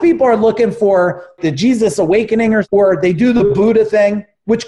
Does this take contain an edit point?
yes; 2 cuts; at 1.4 s, 2.6 s

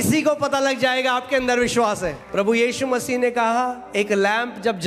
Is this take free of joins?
no; 1 cut; at 2.2 s

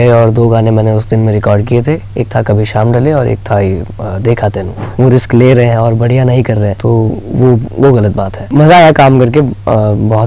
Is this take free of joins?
no; 3 cuts; at 4.8 s, 6.8 s, 8.4 s

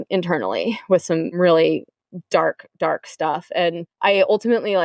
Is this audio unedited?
no; 2 cuts; at 1.4 s, 3.9 s

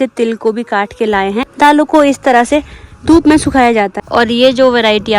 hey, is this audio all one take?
no; 2 cuts; at 1.4 s, 3.9 s

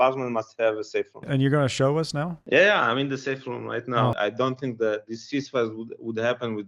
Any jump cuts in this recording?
yes; 3 cuts; at 1.3 s, 2.4 s, 4.1 s

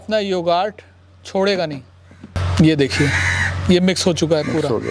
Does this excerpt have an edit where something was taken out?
yes; 1 cut; at 2.3 s

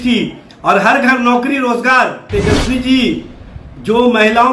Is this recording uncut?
no; 1 cut; at 2.3 s

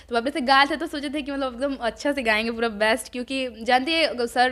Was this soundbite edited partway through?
no; 0 cuts

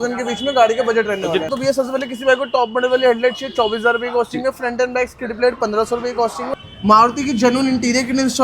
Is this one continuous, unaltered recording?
no; 2 cuts; at 1.5 s, 6.5 s

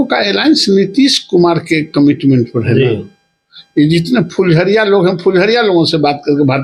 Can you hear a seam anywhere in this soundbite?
no; 0 cuts

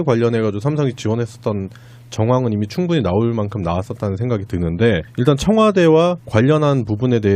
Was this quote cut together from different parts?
yes; 1 cut; at 2.8 s

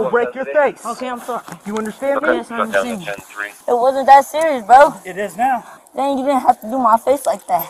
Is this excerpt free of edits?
no; 2 cuts; at 3.5 s, 5.7 s

